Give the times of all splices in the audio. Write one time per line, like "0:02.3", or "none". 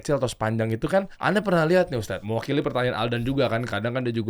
0:01.1
0:02.2